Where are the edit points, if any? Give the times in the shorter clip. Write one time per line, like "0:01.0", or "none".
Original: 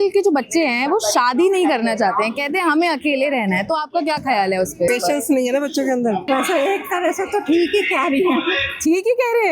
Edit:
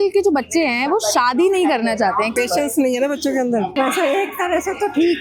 0:02.4